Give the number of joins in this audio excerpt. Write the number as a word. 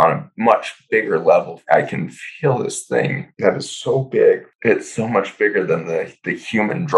three